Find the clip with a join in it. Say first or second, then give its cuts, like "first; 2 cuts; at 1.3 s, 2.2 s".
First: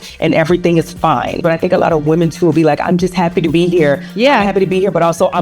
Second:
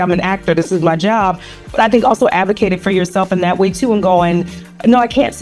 first; 1 cut; at 1.4 s